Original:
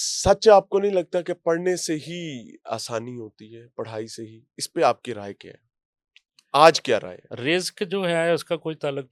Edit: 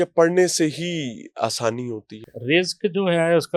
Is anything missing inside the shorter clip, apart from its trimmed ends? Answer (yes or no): yes